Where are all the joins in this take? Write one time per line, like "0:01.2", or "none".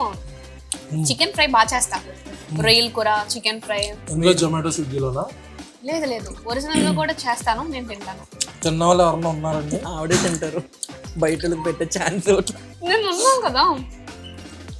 none